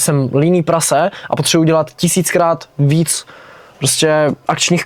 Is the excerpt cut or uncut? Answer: uncut